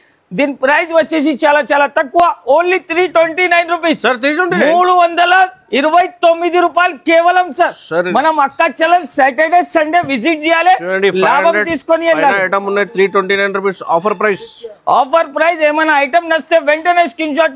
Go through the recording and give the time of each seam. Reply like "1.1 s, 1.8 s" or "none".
none